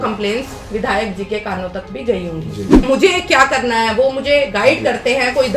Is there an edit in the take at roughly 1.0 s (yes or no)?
no